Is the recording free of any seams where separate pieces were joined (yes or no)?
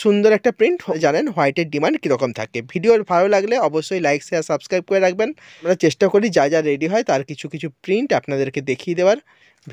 no